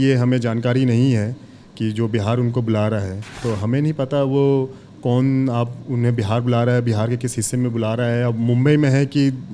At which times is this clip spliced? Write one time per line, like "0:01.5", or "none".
0:03.4